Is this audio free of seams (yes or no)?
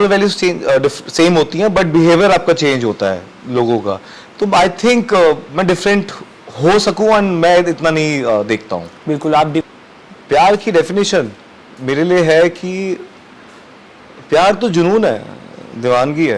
no